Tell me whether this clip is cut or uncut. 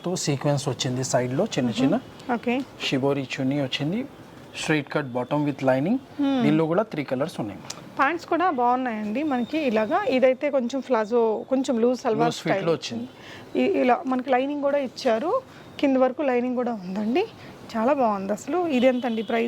uncut